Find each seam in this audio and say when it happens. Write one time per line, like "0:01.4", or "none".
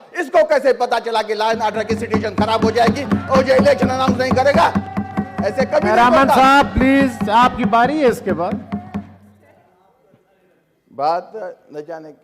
none